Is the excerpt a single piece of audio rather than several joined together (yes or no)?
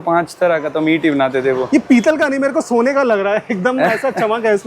yes